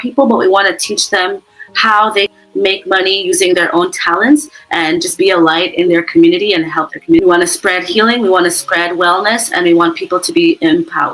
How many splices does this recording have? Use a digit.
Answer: 2